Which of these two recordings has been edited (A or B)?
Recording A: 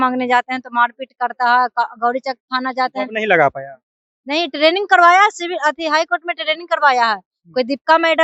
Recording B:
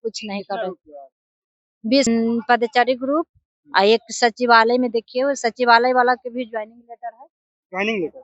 B